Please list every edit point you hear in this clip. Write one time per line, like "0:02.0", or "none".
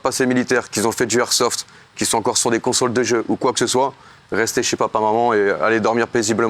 none